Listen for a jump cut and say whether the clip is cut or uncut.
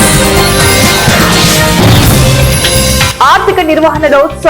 cut